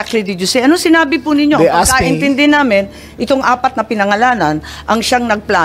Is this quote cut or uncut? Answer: uncut